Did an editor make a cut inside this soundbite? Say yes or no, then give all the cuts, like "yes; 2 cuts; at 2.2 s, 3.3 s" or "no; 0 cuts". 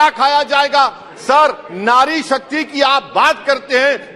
no; 0 cuts